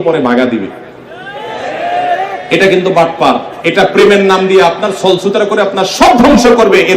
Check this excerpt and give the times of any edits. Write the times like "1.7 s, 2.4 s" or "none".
3.5 s